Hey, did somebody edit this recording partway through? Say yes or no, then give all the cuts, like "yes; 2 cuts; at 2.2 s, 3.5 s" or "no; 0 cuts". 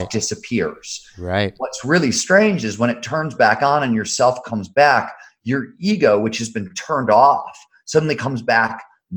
no; 0 cuts